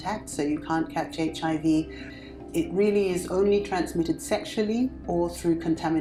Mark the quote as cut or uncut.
uncut